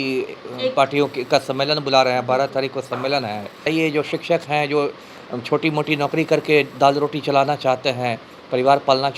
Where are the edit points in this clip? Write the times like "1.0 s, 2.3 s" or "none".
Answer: 3.7 s